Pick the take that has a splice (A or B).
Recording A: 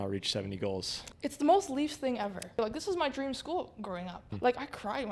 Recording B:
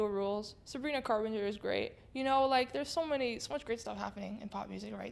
A